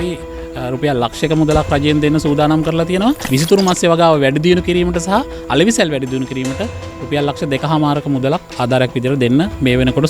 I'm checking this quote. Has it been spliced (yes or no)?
no